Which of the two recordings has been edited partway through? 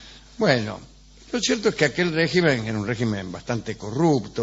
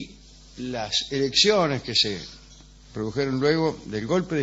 first; 1 cut; at 3.4 s

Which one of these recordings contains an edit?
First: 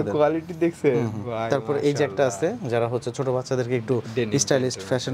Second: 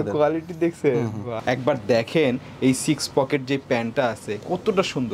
second; 1 cut; at 1.3 s

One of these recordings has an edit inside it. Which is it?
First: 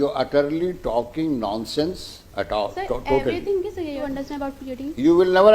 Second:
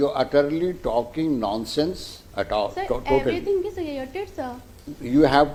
first; 1 cut; at 4.0 s

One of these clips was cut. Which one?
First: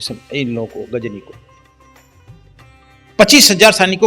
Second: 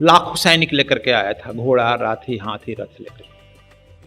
first; 2 cuts; at 1.3 s, 3.2 s

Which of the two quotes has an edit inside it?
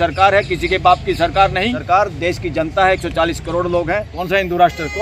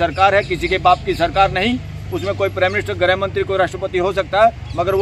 first; 2 cuts; at 1.8 s, 4.1 s

